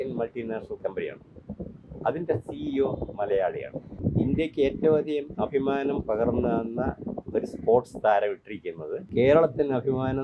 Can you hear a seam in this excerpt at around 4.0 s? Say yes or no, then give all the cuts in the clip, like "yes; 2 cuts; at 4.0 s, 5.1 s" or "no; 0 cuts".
yes; 2 cuts; at 4.0 s, 9.1 s